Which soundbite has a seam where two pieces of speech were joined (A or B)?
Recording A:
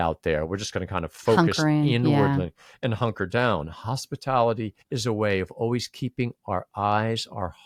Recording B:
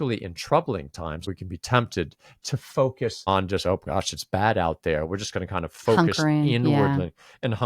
B